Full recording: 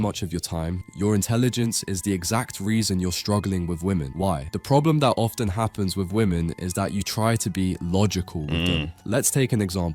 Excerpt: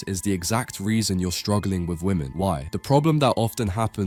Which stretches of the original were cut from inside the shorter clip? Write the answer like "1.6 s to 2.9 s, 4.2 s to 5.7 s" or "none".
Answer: none

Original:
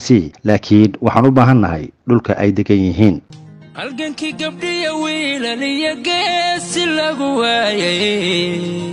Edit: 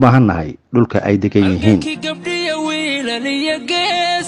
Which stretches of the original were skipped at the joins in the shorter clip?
3.2 s to 4.2 s

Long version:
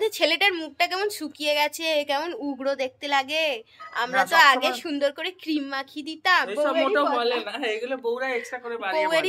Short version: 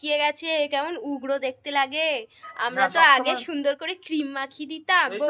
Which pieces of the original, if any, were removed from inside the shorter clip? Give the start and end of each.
none

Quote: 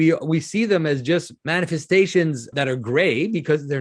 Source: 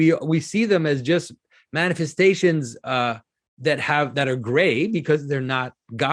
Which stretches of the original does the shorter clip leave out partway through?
1.4 s to 1.6 s, 2.8 s to 4.1 s

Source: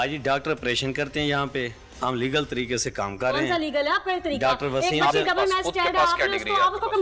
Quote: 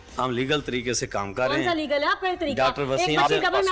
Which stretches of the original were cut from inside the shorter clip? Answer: none

